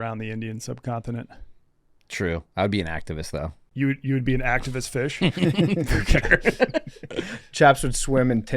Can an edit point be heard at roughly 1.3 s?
no; 1 cut; at 3.6 s

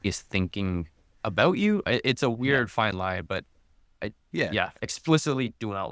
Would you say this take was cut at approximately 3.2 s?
no; 1 cut; at 1.8 s

